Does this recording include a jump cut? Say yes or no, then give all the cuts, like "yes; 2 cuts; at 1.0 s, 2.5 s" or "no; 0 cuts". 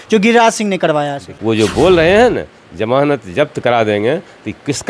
yes; 1 cut; at 1.3 s